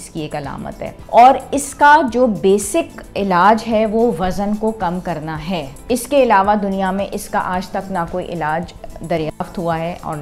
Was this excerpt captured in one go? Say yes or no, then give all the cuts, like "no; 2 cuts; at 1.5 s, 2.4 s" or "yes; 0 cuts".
no; 2 cuts; at 1.0 s, 5.7 s